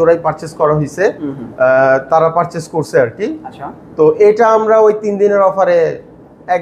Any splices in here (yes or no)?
no